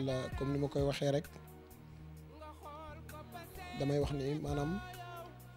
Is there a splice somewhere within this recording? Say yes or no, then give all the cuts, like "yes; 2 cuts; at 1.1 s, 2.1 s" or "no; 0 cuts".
yes; 3 cuts; at 1.7 s, 3.1 s, 4.8 s